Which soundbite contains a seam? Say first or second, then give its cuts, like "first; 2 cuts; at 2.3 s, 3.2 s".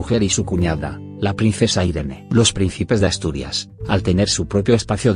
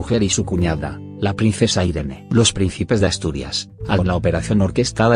first; 1 cut; at 4.0 s